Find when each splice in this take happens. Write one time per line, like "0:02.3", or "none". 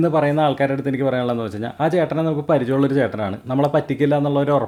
none